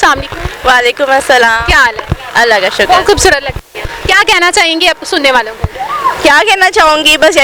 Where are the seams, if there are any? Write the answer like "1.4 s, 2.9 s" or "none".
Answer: none